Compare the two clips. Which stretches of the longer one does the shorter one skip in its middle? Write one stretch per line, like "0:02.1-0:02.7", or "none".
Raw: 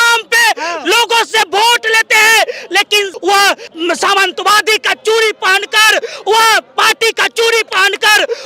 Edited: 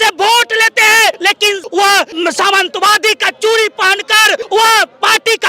0:02.5-0:02.7
0:03.6-0:03.7
0:06.1-0:06.2